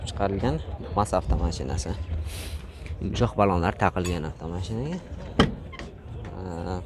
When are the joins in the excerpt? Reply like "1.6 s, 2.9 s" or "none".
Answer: none